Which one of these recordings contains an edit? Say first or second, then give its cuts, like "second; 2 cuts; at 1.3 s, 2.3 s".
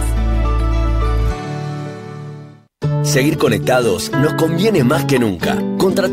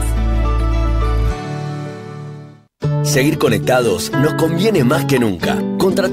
second; 1 cut; at 2.7 s